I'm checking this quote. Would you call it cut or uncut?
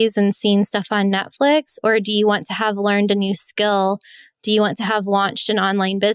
uncut